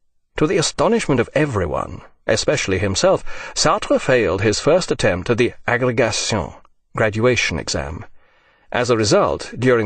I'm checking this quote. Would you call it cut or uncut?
cut